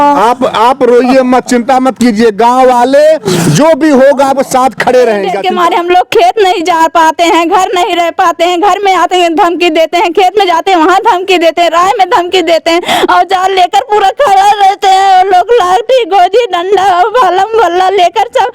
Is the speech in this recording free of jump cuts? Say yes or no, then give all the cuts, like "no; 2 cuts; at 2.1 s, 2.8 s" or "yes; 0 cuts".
no; 1 cut; at 5.3 s